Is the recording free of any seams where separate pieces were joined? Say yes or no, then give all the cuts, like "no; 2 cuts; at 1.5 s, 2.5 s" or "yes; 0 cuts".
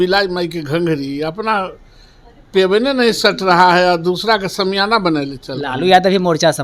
yes; 0 cuts